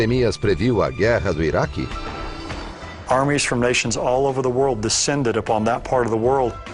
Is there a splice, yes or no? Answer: no